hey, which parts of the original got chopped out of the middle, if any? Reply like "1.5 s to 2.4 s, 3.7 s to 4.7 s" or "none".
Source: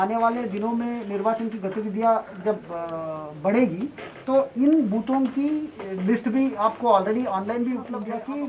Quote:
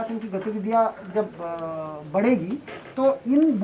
none

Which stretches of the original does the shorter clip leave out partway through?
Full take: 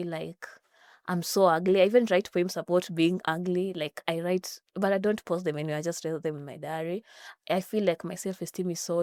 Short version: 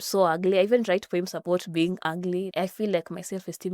3.7 s to 7.4 s

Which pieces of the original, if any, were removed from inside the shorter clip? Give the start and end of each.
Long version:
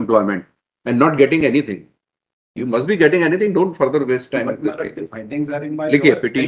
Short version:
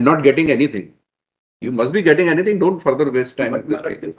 none

